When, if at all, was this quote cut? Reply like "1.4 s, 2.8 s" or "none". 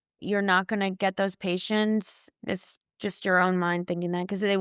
2.3 s